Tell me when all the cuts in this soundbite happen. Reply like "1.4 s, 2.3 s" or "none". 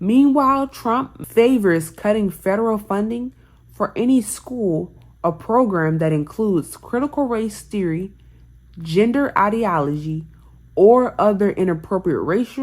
1.2 s